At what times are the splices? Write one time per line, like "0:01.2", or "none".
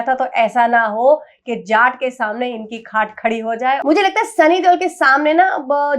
0:03.8